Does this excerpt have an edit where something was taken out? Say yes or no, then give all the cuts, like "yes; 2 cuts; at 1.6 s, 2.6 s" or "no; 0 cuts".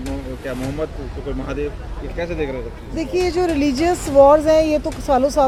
no; 0 cuts